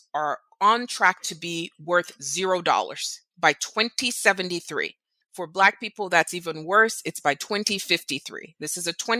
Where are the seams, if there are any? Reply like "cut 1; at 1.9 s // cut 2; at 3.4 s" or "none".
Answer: none